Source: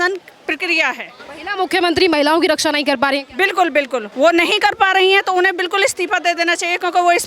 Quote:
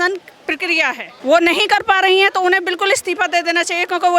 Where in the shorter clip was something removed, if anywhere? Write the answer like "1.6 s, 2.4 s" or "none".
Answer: 1.2 s